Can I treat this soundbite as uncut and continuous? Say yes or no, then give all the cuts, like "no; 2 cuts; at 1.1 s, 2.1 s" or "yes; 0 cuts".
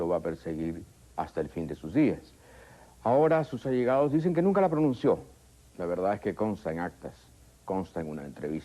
no; 1 cut; at 1.6 s